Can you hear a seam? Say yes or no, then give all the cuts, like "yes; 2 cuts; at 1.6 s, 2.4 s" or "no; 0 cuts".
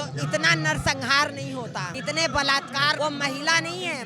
yes; 2 cuts; at 1.9 s, 3.0 s